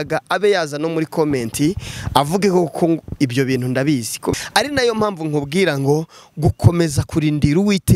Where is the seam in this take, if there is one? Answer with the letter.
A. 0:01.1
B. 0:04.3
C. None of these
B